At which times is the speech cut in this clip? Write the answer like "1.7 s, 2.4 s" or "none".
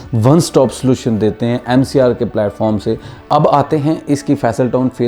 3.1 s